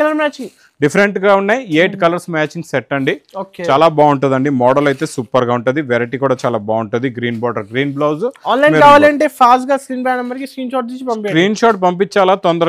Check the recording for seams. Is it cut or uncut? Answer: uncut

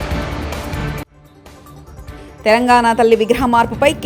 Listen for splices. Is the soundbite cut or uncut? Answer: cut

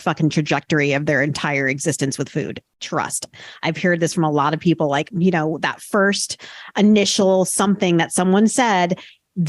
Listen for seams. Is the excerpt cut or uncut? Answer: cut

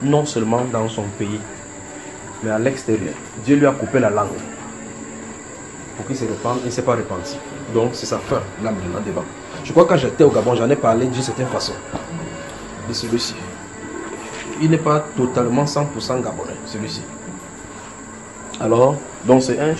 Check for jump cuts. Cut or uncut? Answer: uncut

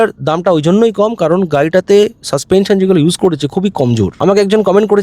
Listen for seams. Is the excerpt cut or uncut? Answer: cut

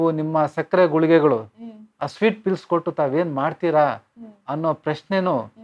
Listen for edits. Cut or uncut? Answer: uncut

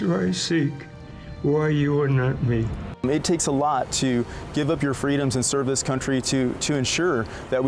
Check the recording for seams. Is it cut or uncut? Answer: cut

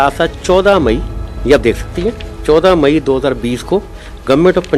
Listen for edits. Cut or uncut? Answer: uncut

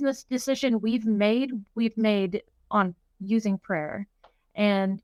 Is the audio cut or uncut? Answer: uncut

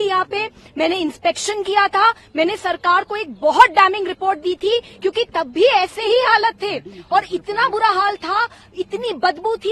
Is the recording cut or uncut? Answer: uncut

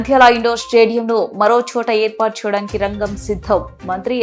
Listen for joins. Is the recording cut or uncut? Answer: uncut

